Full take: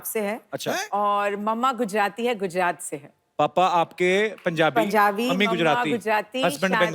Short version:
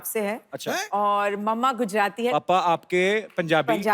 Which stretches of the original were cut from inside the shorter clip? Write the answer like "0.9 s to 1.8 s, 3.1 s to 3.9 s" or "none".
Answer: 2.3 s to 3.4 s

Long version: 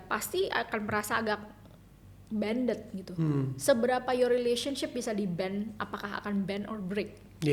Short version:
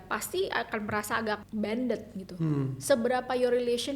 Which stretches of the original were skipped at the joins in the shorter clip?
1.5 s to 2.2 s

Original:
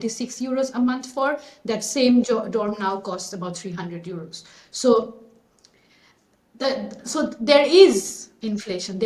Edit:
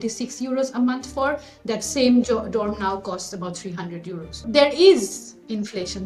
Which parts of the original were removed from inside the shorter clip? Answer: 4.4 s to 7.3 s

